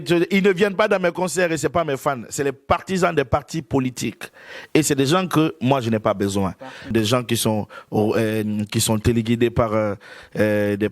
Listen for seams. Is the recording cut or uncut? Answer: cut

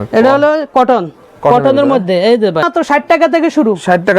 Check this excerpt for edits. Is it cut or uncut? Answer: cut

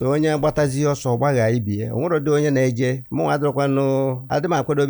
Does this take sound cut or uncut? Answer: uncut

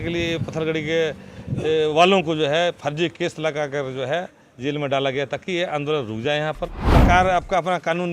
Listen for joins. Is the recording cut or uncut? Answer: cut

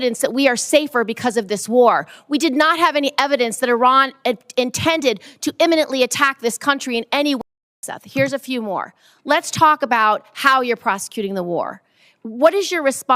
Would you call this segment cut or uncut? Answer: cut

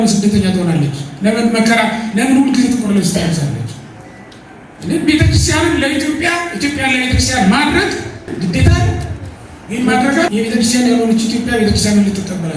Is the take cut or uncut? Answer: cut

